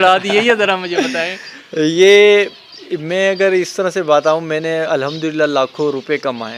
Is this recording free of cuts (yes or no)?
yes